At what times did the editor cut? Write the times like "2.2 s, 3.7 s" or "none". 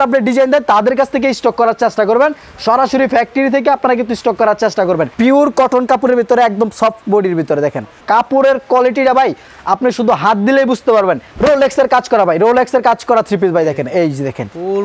5.1 s, 8.0 s, 11.3 s